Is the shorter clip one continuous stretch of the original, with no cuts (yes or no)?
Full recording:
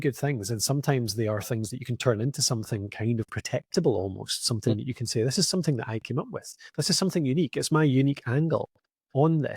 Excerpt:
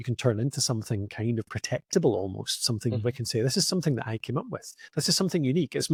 yes